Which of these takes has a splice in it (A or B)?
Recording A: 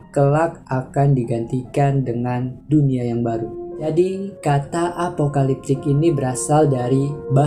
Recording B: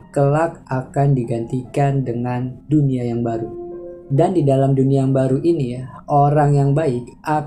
A